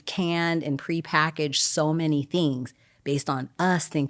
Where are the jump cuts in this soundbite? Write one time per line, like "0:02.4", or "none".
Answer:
none